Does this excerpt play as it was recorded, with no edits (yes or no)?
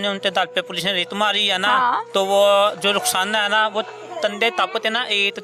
yes